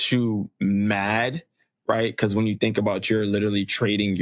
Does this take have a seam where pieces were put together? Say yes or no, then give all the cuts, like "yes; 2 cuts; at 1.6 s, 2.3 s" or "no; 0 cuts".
no; 0 cuts